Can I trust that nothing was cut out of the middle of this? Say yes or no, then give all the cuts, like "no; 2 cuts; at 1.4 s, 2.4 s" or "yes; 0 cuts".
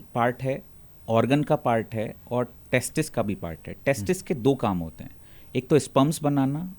yes; 0 cuts